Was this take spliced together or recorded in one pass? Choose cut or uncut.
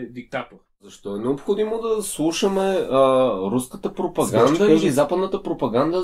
cut